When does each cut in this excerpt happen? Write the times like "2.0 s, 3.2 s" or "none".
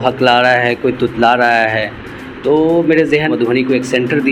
3.3 s